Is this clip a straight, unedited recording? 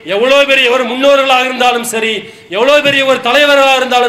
yes; 0 cuts

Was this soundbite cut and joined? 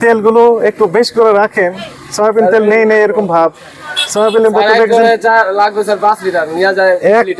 no; 0 cuts

